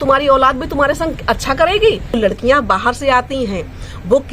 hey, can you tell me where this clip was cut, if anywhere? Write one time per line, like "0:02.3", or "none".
0:02.2